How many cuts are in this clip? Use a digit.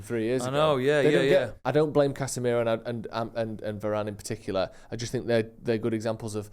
1